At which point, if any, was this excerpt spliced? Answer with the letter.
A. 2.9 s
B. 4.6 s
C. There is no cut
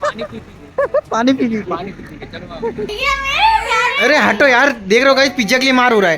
A